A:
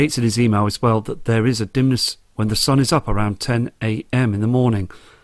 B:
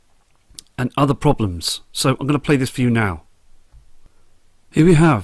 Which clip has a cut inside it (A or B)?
B